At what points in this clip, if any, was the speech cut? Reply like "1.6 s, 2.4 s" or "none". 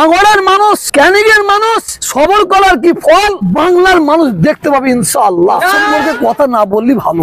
0.9 s, 2.0 s, 3.4 s, 5.9 s